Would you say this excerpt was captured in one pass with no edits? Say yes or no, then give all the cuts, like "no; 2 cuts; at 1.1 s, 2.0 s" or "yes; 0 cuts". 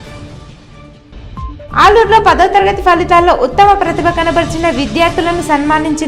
no; 1 cut; at 1.3 s